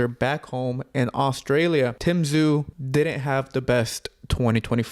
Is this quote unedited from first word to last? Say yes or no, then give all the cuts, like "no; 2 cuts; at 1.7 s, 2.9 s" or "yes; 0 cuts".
no; 2 cuts; at 2.0 s, 2.8 s